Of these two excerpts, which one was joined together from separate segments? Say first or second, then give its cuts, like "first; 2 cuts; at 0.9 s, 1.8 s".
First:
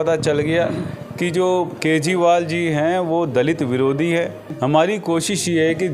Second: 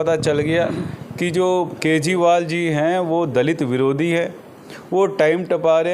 first; 1 cut; at 4.4 s